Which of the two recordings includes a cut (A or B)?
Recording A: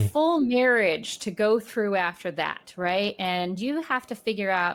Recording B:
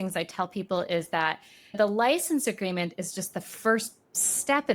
B